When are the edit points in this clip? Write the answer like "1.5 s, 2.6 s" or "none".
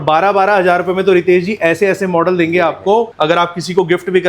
3.1 s